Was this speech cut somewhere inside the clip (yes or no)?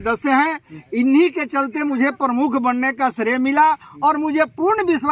no